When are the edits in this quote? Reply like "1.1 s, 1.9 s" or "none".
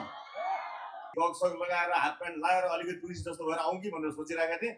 1.0 s